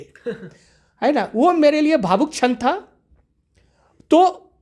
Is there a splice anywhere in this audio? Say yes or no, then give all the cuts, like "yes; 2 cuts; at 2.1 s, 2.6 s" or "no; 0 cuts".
no; 0 cuts